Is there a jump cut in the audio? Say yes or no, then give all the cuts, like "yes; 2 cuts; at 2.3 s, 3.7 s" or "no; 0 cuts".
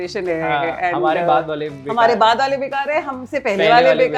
no; 0 cuts